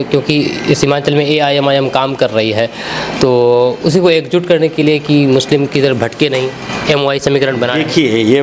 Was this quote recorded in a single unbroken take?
yes; 0 cuts

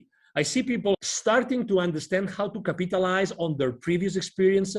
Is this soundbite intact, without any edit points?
no; 1 cut; at 0.9 s

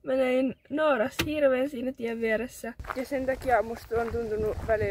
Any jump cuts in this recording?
yes; 1 cut; at 2.8 s

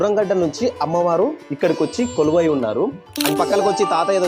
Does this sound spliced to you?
yes; 1 cut; at 3.3 s

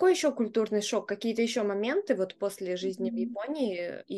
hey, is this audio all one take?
yes; 0 cuts

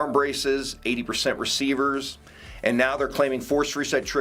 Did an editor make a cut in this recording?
no; 0 cuts

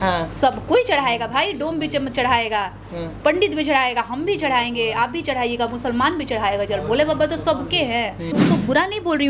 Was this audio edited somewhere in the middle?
yes; 1 cut; at 8.3 s

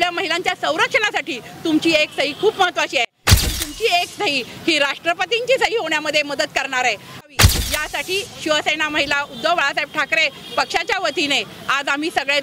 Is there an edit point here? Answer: yes; 1 cut; at 7.3 s

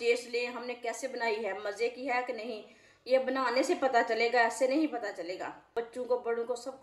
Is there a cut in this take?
yes; 1 cut; at 5.7 s

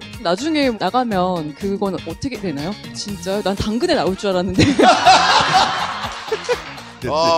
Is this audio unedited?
no; 1 cut; at 3.0 s

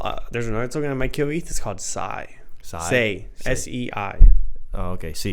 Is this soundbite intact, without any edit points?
yes; 0 cuts

